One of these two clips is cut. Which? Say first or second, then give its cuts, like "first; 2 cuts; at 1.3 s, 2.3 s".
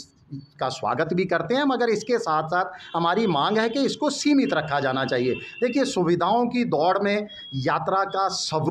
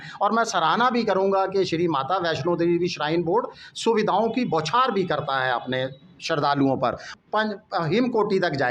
second; 1 cut; at 7.0 s